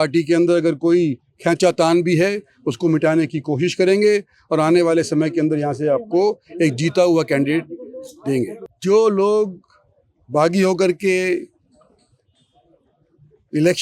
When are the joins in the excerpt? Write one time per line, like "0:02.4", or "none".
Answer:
0:08.6